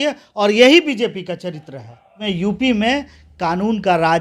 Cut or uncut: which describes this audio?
cut